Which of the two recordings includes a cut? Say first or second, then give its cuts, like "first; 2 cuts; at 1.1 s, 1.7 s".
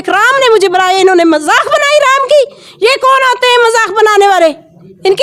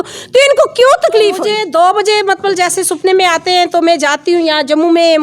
second; 1 cut; at 1.5 s